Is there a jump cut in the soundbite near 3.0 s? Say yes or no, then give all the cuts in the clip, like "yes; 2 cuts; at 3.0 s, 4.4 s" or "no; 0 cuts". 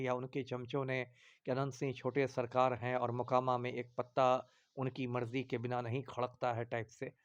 no; 0 cuts